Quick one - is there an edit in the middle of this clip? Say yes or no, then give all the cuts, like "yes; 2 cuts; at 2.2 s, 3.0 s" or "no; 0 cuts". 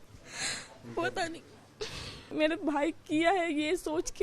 yes; 1 cut; at 2.3 s